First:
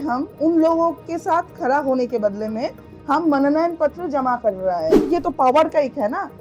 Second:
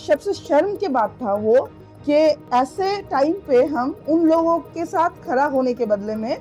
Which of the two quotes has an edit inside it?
first; 1 cut; at 4.9 s

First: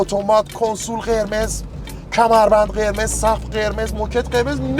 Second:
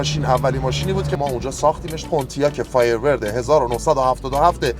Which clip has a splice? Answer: second; 2 cuts; at 1.2 s, 2.0 s

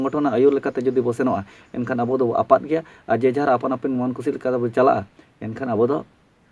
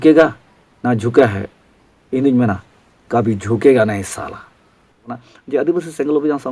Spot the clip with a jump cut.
second; 1 cut; at 5.1 s

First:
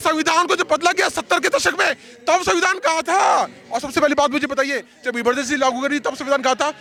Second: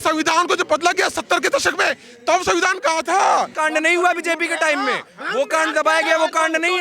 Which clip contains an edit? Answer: second; 1 cut; at 3.5 s

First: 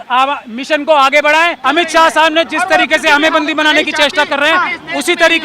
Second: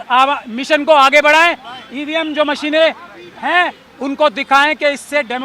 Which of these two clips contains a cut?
first; 1 cut; at 1.6 s

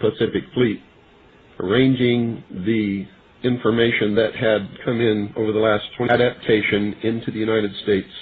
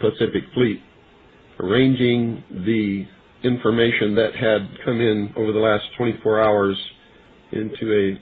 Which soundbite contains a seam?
second; 1 cut; at 6.1 s

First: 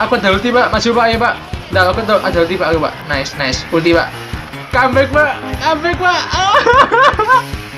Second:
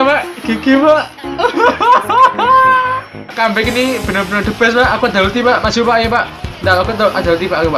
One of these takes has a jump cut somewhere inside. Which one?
second; 1 cut; at 3.3 s

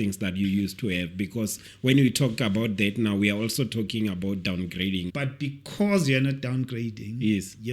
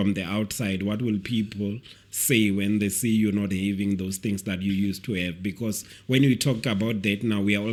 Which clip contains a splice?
first; 1 cut; at 5.1 s

